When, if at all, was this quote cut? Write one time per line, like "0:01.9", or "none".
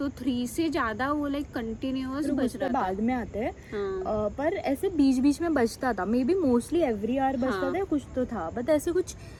none